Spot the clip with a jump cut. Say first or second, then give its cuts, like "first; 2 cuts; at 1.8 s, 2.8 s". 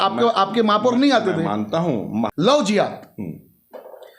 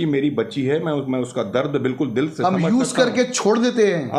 first; 1 cut; at 2.3 s